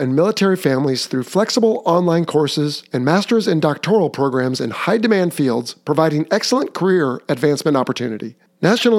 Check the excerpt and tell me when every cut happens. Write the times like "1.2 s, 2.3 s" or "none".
none